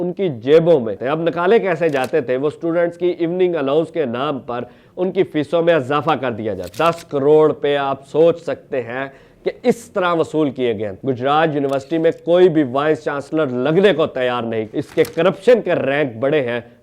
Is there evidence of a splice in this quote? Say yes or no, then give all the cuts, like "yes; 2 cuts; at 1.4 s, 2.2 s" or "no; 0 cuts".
yes; 4 cuts; at 0.9 s, 6.6 s, 10.9 s, 14.7 s